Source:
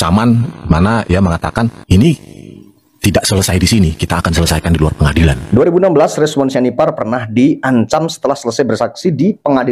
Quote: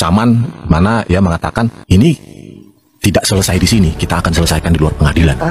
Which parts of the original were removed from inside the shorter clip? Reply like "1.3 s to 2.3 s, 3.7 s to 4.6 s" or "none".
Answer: none